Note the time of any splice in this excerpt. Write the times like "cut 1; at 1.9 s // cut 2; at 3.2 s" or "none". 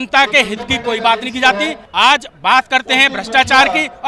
cut 1; at 1.8 s